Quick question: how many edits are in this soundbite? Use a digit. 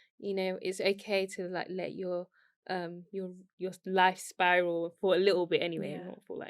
0